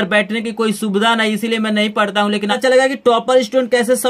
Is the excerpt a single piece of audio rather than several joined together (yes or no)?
no